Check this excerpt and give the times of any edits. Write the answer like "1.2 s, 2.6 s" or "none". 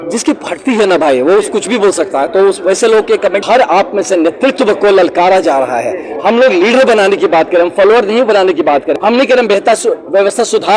3.4 s, 8.9 s